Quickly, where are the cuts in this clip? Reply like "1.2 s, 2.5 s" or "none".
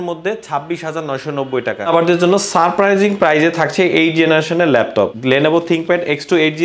1.9 s, 5.2 s